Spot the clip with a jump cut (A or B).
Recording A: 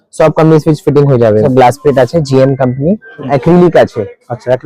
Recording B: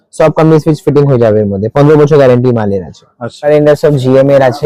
A